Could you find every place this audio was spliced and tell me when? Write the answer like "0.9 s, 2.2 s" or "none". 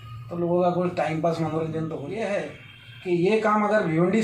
2.1 s